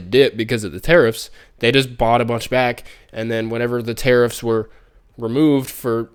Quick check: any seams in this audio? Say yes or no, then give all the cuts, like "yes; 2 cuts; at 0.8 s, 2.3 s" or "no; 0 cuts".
no; 0 cuts